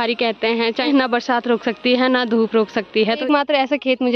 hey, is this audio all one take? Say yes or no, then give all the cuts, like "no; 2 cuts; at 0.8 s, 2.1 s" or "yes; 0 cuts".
no; 2 cuts; at 0.9 s, 3.0 s